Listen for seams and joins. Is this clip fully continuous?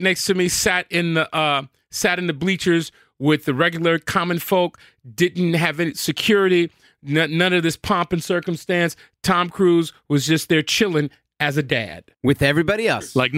no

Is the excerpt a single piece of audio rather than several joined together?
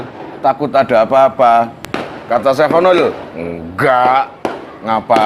yes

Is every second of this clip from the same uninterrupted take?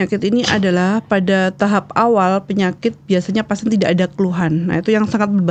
yes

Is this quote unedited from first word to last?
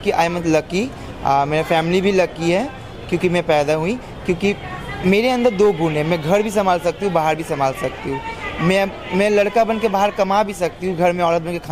yes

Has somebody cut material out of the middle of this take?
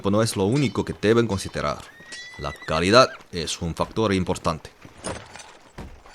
yes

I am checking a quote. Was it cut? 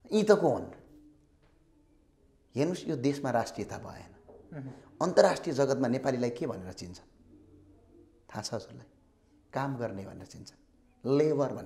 no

